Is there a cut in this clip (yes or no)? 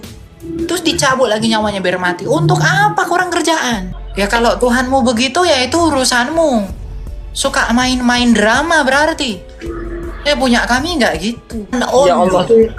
yes